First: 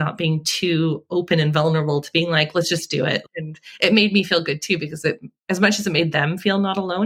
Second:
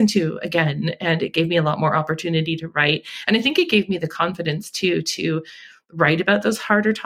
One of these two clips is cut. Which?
first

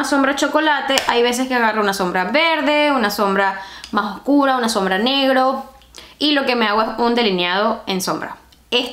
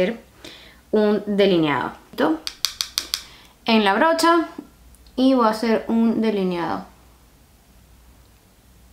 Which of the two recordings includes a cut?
second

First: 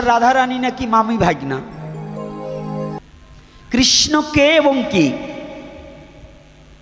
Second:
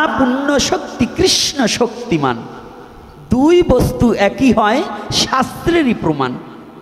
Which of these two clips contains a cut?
first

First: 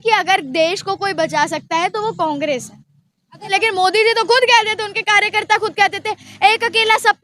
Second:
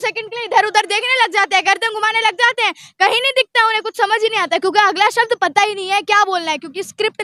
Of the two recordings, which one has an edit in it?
first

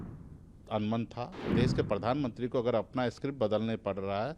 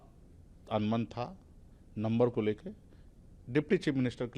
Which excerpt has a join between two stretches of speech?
first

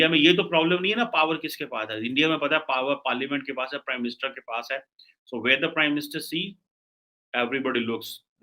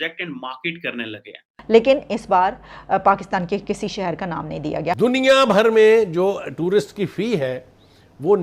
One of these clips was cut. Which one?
second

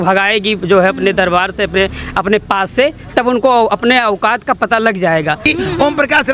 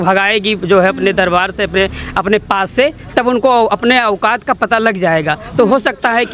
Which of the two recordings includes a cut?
first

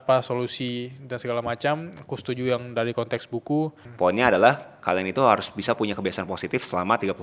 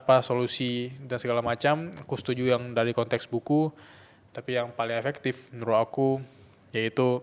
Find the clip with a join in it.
first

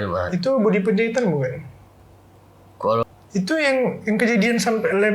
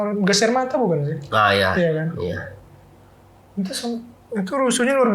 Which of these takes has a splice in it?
first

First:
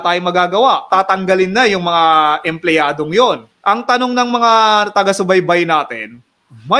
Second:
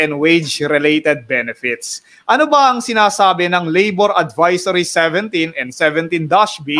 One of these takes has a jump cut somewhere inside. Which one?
first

